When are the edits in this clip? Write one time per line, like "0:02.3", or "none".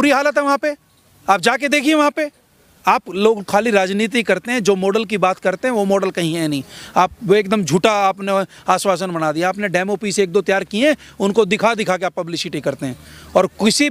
none